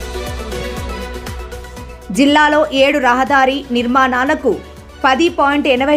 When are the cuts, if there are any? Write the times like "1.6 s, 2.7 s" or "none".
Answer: 1.9 s